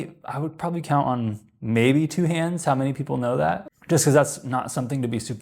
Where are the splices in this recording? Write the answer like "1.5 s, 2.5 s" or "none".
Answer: 3.7 s